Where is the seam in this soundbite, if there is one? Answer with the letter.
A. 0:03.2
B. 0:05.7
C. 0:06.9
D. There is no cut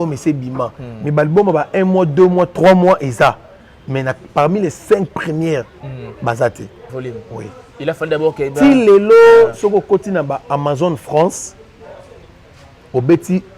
C